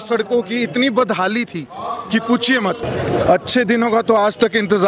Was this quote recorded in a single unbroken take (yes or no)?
no